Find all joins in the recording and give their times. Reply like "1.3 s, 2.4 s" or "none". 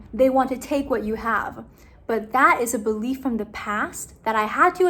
none